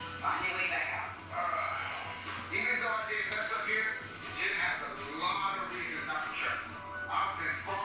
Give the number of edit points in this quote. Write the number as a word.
zero